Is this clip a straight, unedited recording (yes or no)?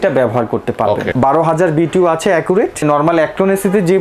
no